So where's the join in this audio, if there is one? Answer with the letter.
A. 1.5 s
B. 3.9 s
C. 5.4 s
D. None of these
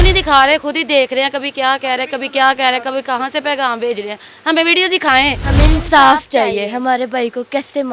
C